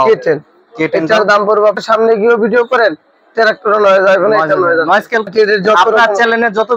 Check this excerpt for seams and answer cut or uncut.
cut